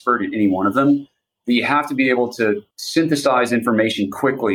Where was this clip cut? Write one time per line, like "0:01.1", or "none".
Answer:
none